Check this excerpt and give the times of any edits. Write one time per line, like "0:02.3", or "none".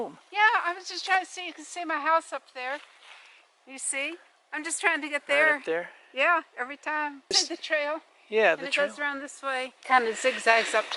none